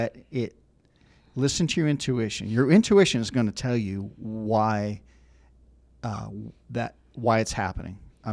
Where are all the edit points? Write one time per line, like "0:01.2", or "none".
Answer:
none